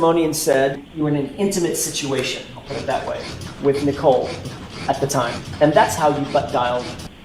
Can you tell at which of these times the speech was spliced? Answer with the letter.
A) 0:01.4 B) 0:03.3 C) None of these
C